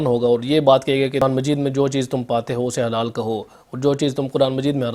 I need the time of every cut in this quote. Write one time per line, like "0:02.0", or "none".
0:01.2

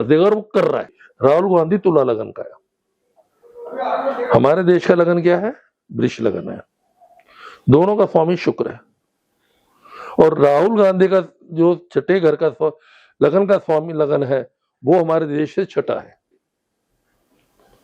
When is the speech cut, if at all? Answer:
0:01.0

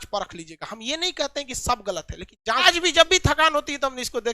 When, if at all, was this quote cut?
0:02.7

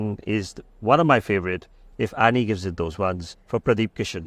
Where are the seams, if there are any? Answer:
none

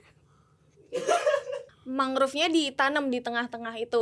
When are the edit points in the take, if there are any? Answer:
0:01.8

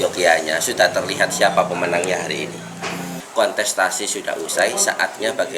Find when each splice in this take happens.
0:03.2

